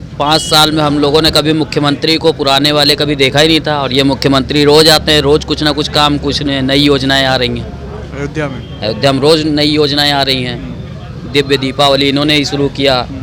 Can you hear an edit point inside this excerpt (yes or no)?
no